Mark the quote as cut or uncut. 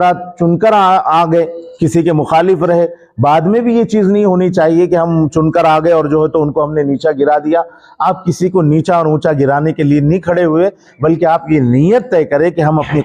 uncut